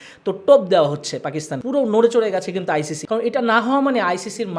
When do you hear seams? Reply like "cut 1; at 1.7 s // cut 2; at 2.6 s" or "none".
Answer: cut 1; at 1.5 s // cut 2; at 3.0 s